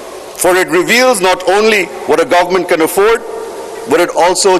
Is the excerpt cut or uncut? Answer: uncut